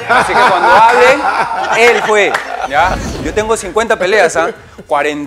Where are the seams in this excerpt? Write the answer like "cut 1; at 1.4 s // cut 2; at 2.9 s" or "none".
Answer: cut 1; at 3.1 s